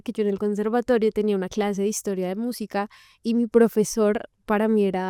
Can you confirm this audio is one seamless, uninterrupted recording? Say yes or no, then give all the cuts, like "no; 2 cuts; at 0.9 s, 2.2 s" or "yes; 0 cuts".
yes; 0 cuts